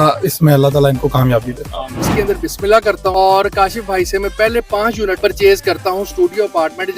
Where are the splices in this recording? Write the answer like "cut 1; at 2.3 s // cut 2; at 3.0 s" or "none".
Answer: cut 1; at 2.1 s // cut 2; at 3.1 s // cut 3; at 5.2 s